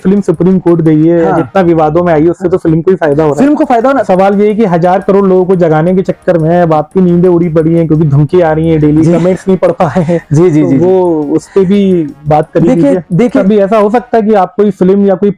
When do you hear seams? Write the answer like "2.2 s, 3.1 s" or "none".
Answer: 4.0 s, 13.4 s